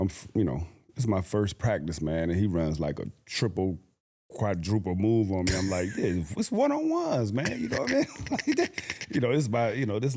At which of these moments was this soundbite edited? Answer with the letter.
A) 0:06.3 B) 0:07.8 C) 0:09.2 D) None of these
D